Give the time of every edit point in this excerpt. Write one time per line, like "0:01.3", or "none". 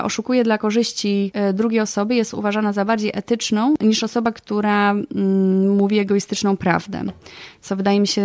0:01.3
0:03.8